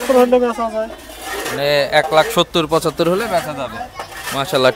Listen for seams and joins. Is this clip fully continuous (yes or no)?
yes